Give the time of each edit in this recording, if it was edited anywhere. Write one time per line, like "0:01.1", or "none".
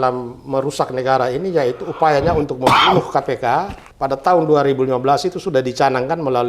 0:03.8

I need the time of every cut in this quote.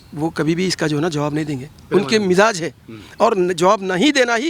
none

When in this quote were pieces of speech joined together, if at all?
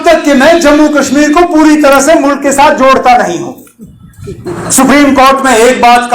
0:04.5

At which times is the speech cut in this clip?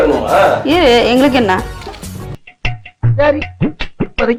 none

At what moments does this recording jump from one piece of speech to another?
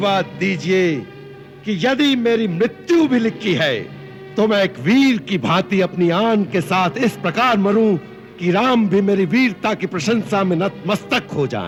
none

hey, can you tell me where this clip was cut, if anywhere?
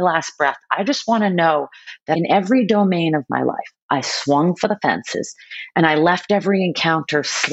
0:02.1

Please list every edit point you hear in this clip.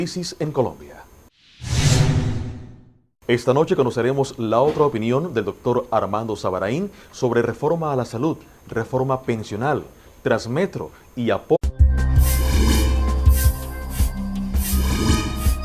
none

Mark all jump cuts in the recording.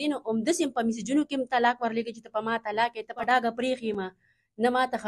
0:03.2

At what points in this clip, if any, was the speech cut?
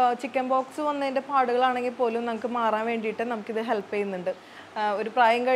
0:04.4

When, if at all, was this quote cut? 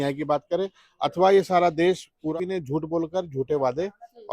0:02.3

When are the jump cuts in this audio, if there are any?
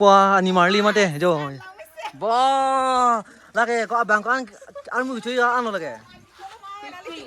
none

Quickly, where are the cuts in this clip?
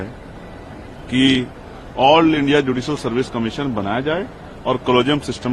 none

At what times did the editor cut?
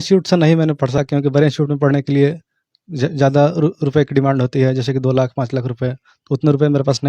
0:01.0

